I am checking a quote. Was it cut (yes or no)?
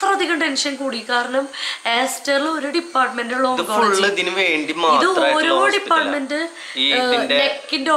no